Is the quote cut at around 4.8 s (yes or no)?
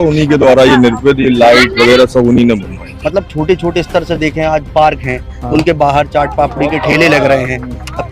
no